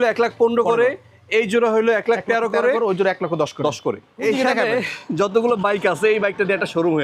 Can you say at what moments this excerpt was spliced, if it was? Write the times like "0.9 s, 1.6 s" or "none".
none